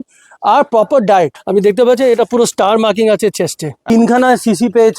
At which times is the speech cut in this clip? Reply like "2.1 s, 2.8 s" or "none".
1.4 s, 3.9 s

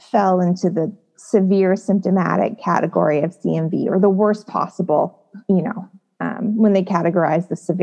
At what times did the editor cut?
none

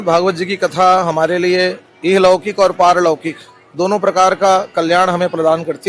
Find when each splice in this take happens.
none

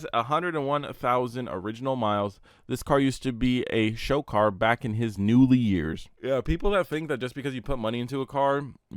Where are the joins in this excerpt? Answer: 6.1 s

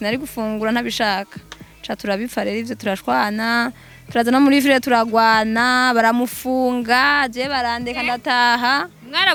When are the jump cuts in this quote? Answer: none

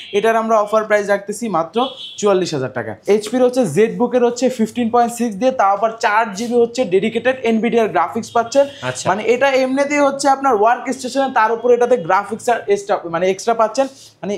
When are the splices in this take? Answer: 3.0 s

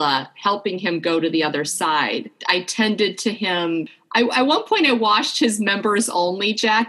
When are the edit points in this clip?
2.3 s, 4.0 s

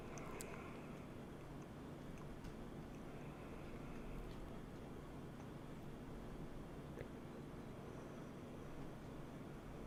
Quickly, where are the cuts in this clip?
none

